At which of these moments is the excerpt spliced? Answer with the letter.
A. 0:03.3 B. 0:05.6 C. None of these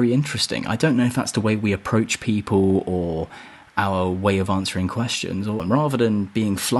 B